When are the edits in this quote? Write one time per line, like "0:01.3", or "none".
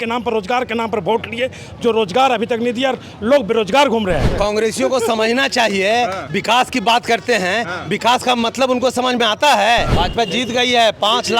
0:04.3
0:09.9